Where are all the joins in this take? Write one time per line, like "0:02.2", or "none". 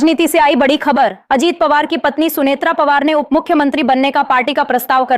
none